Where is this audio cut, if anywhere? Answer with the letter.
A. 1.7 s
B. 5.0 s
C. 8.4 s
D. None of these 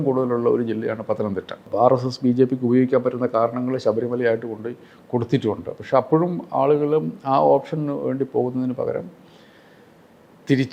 A